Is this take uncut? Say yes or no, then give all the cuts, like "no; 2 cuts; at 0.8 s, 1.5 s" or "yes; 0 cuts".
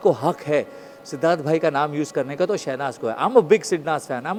yes; 0 cuts